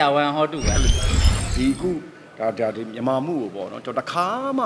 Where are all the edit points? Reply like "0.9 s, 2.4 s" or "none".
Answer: 1.1 s